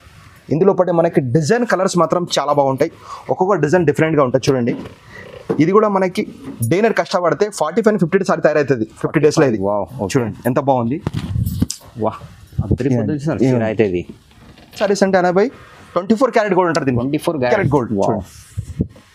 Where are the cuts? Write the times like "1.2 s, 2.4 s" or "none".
14.8 s